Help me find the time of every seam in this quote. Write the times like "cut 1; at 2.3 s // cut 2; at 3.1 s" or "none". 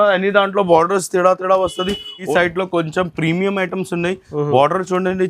cut 1; at 2.3 s